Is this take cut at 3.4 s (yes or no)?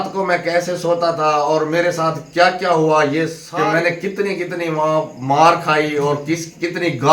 yes